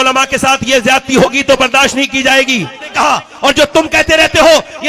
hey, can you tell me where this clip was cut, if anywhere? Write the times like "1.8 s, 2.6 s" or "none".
2.9 s